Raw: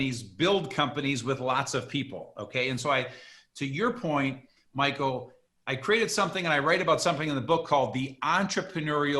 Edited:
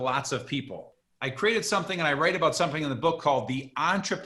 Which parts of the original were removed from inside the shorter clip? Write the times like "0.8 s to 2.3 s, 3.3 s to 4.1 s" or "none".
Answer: 2.4 s to 5.4 s

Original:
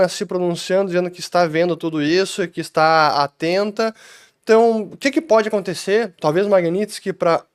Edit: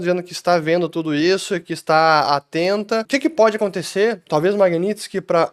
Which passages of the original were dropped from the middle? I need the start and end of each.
3.9 s to 5.0 s

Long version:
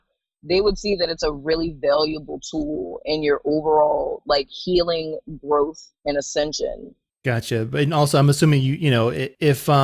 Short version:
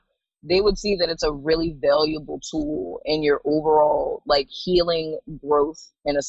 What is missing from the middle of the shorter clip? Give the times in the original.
none

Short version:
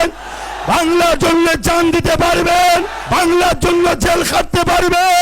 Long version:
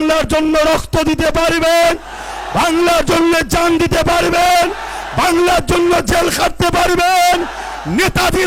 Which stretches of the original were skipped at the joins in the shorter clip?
4.8 s to 5.0 s

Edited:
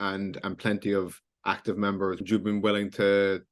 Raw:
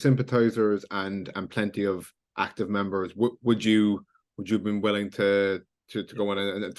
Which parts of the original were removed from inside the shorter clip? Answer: 3.1 s to 4.4 s

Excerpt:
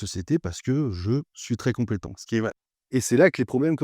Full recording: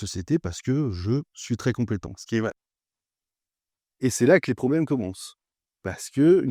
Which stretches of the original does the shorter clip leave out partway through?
2.7 s to 3.8 s

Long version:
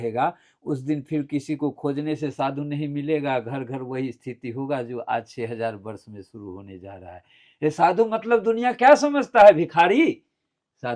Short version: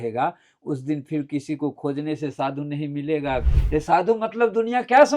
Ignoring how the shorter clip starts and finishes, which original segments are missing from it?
3.5 s to 7.4 s

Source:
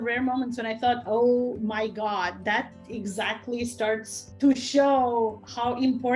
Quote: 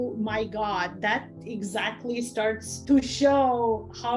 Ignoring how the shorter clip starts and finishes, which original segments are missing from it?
4.1 s to 4.2 s

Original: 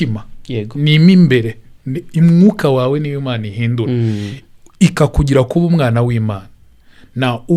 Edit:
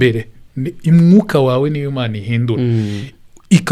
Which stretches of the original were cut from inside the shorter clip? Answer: none

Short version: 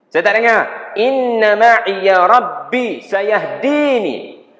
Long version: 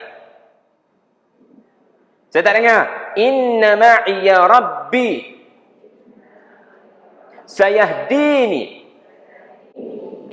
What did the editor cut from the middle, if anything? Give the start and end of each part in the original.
5.2 s to 7.5 s

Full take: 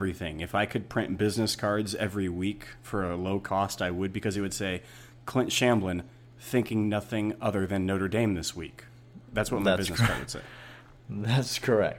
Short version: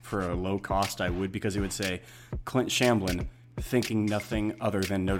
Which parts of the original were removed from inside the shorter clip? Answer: none

